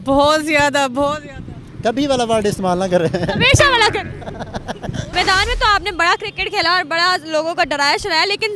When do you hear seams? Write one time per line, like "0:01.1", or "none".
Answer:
0:05.1